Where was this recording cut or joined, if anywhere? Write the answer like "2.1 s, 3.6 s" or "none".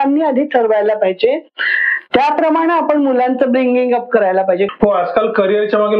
4.7 s